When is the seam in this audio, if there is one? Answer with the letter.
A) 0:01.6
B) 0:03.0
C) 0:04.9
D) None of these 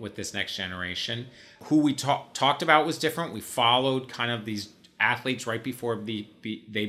A